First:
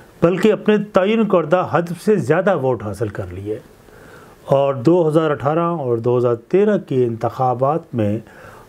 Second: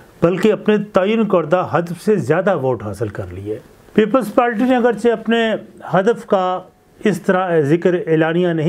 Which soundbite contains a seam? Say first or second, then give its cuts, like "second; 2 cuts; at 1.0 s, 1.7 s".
second; 1 cut; at 3.7 s